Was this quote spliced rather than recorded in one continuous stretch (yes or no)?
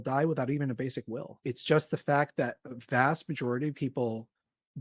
yes